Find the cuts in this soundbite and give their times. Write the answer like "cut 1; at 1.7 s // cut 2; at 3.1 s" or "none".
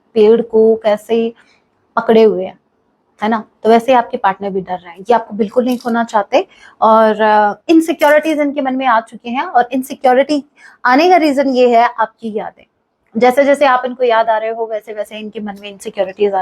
none